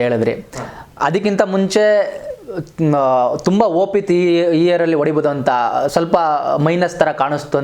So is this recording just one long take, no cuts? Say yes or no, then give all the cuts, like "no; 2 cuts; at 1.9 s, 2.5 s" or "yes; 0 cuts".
yes; 0 cuts